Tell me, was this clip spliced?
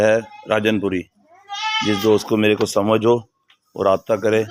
no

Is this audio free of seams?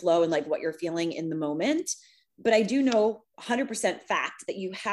yes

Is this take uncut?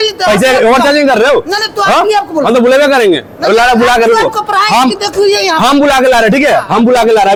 yes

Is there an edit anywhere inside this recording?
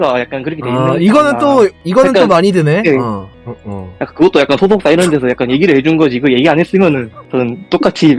yes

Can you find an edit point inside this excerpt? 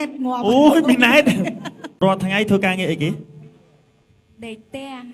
yes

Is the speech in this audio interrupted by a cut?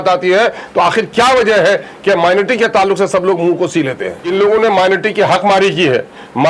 yes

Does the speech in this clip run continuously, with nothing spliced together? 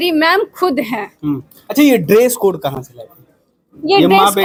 yes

